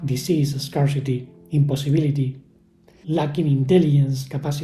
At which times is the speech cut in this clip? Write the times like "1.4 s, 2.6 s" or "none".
none